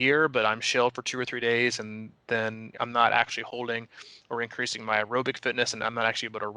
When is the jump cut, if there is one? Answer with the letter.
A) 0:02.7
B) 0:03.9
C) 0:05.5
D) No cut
A